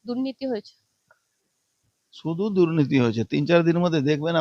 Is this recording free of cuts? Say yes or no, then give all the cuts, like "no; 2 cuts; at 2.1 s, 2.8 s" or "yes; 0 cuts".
yes; 0 cuts